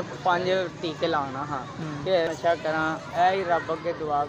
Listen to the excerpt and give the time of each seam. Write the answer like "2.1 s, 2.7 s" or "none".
2.3 s